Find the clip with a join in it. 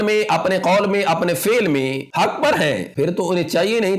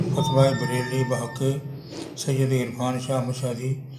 first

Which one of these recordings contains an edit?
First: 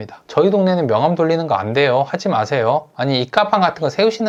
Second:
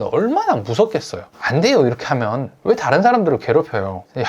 second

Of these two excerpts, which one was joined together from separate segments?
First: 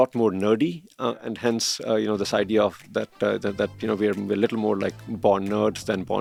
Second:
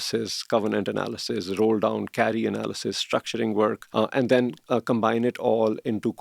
second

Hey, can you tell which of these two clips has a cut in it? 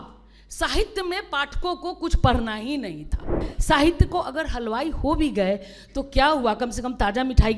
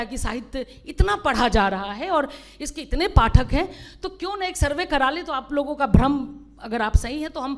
first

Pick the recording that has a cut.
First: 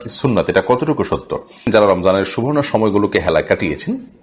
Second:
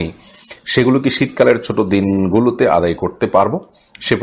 first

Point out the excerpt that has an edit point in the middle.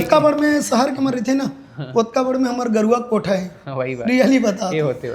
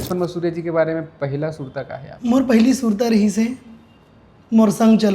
second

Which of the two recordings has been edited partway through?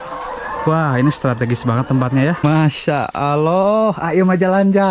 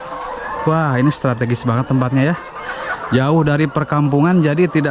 first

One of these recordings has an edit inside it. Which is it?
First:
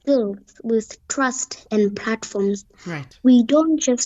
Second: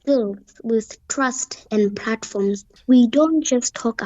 second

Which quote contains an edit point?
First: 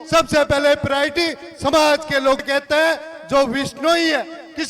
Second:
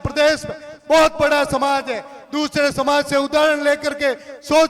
first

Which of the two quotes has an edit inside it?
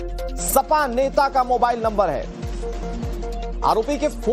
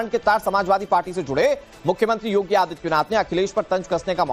first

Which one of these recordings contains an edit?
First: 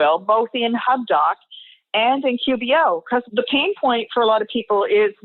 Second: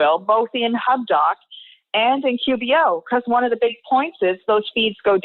first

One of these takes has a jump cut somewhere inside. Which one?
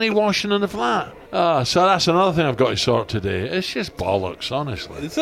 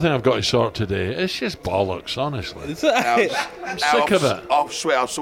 first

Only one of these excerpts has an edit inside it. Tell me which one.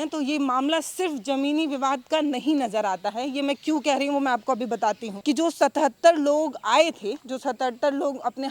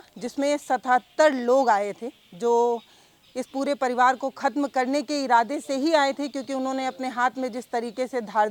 first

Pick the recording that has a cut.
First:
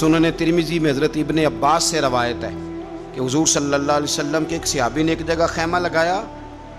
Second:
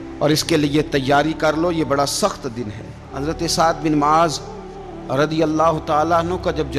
second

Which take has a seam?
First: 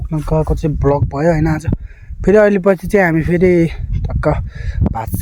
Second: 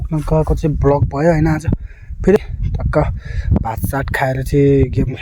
second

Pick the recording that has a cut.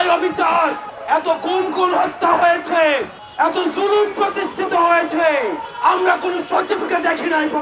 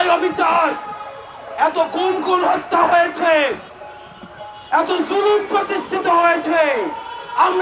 first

